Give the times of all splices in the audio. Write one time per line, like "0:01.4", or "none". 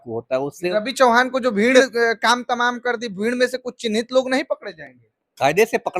0:00.7
0:01.9